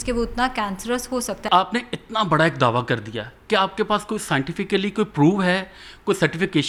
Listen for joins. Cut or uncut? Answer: uncut